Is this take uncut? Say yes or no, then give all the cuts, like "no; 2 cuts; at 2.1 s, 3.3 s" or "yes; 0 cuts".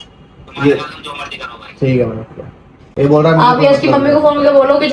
yes; 0 cuts